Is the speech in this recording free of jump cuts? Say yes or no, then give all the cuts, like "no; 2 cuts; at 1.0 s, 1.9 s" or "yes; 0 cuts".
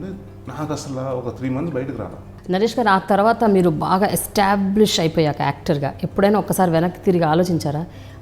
no; 1 cut; at 2.4 s